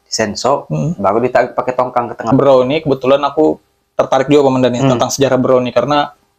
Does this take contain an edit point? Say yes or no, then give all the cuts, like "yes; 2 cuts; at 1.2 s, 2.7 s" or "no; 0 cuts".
yes; 1 cut; at 2.3 s